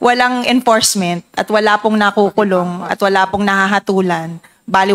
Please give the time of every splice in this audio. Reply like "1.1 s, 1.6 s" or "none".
none